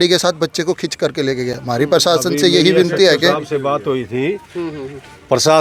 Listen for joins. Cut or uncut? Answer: uncut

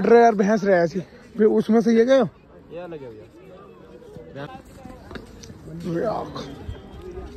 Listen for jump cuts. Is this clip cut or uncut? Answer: cut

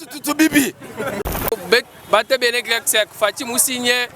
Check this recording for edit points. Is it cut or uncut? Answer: cut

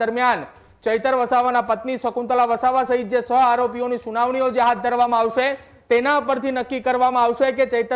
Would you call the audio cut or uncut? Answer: uncut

